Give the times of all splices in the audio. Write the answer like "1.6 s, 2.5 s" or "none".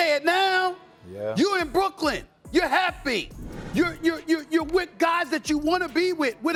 none